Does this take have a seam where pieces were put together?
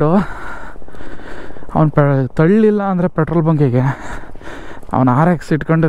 no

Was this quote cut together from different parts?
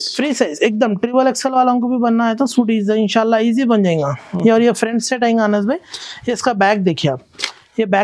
no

